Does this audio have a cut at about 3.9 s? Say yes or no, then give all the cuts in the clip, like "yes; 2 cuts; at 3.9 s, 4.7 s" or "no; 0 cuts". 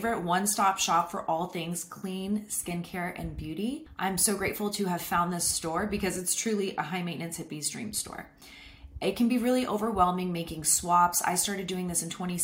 yes; 1 cut; at 3.9 s